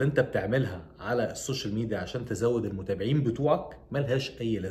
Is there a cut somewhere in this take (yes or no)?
no